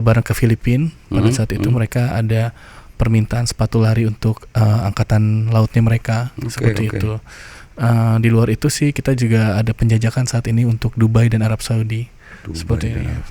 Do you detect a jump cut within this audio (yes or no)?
no